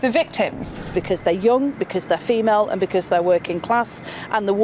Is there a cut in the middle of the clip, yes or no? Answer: no